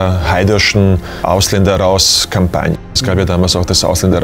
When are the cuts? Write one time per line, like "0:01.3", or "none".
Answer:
0:01.2